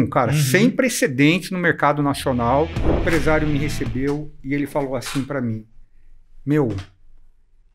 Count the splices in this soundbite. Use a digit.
1